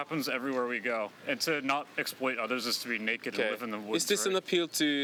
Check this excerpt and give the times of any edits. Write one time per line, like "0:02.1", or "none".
none